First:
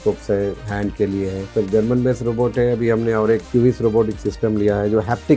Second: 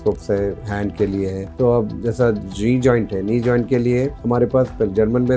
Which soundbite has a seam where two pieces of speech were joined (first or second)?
first